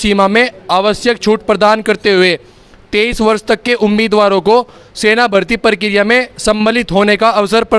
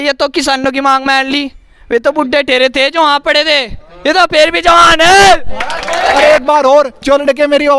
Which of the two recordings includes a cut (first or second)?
second